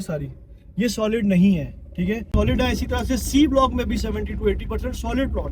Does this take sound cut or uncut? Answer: cut